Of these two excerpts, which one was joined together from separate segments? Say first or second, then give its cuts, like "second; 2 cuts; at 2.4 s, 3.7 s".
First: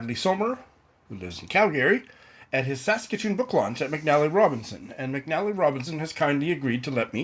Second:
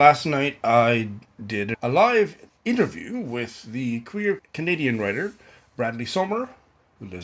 second; 3 cuts; at 1.7 s, 2.5 s, 4.5 s